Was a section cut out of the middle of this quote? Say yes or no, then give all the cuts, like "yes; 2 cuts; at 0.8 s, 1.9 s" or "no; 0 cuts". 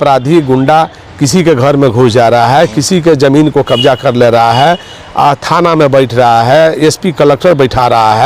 no; 0 cuts